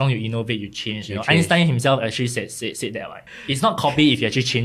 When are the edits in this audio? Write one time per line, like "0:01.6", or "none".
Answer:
0:03.3